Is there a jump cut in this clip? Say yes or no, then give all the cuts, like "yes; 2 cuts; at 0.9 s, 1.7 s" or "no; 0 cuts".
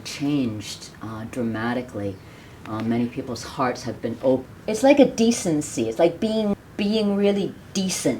yes; 2 cuts; at 4.4 s, 6.6 s